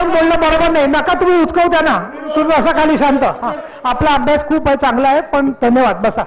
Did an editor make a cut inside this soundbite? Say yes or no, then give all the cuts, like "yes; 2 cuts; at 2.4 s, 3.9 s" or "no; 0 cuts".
yes; 1 cut; at 3.7 s